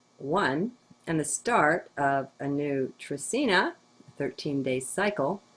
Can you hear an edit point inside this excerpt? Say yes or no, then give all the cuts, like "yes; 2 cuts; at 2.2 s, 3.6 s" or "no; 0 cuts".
yes; 1 cut; at 1.9 s